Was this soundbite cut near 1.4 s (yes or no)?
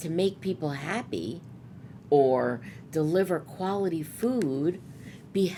no